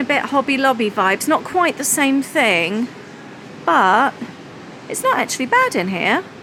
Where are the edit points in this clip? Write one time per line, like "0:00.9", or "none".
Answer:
none